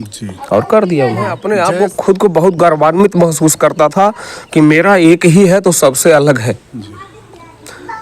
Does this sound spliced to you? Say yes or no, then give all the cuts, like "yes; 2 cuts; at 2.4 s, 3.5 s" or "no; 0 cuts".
yes; 1 cut; at 1.4 s